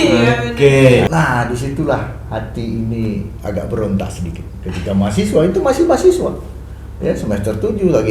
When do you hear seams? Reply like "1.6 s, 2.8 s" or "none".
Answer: 1.1 s

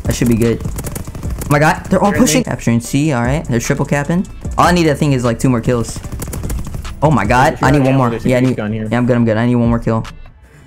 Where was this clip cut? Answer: none

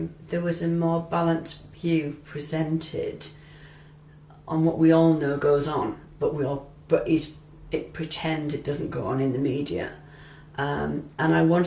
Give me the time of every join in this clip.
none

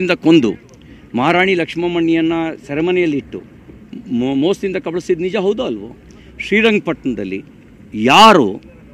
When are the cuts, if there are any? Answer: none

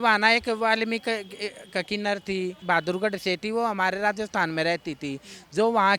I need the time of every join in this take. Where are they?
2.6 s

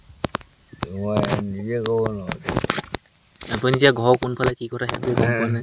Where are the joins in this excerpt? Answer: none

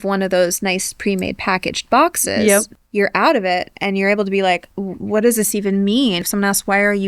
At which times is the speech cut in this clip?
2.8 s, 4.7 s, 6.2 s

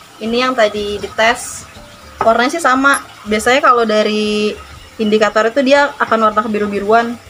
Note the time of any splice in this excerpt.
none

